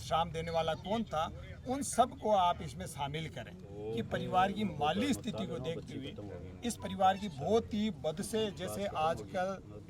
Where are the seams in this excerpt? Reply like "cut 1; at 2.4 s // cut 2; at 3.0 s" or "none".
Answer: cut 1; at 3.7 s

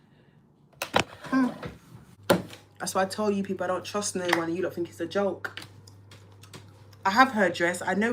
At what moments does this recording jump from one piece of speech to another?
cut 1; at 2.1 s

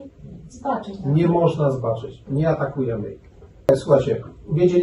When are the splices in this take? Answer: cut 1; at 3.7 s

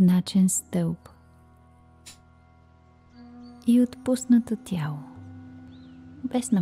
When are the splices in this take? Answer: none

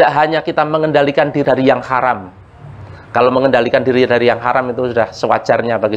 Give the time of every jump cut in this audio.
cut 1; at 1.4 s

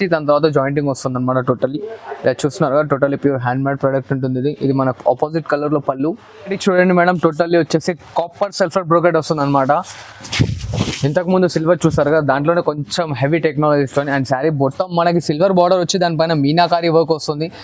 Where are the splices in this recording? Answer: cut 1; at 6.6 s

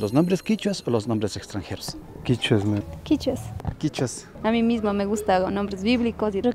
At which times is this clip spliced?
none

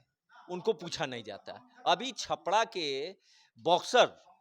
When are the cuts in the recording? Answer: none

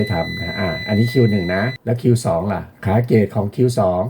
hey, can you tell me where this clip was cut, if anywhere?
cut 1; at 1.8 s // cut 2; at 2.7 s

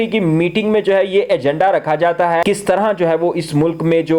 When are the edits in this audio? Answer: cut 1; at 2.4 s

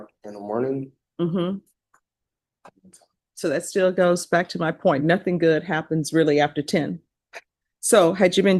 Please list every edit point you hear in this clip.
none

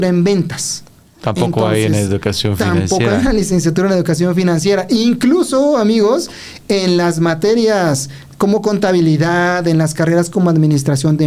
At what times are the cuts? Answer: none

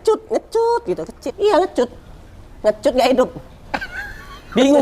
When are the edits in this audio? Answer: cut 1; at 1.3 s

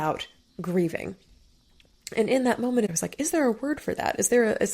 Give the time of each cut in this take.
cut 1; at 2.9 s

